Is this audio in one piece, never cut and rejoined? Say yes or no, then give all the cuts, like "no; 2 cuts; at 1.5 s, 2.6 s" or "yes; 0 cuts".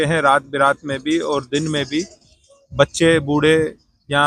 yes; 0 cuts